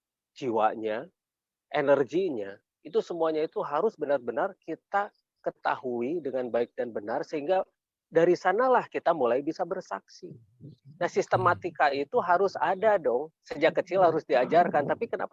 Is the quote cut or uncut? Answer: uncut